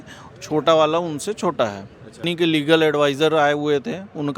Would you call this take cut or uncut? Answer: cut